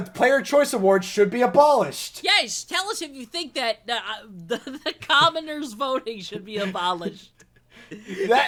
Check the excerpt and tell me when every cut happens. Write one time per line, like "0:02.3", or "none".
none